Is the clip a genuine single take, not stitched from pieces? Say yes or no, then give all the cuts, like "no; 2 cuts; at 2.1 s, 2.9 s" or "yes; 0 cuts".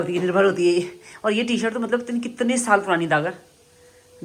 yes; 0 cuts